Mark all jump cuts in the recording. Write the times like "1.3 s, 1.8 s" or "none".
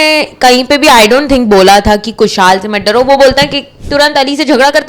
3.8 s